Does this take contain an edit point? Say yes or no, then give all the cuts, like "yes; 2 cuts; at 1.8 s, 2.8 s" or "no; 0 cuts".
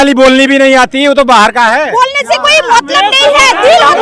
no; 0 cuts